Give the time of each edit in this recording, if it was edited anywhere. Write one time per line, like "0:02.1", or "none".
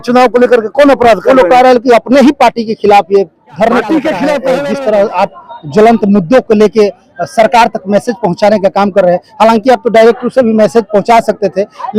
0:04.5